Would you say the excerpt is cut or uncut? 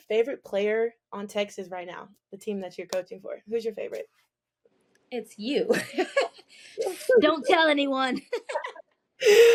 uncut